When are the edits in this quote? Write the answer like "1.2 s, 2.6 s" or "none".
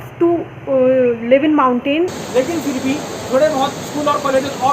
2.1 s